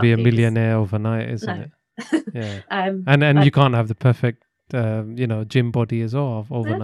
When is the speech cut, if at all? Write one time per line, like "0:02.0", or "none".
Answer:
none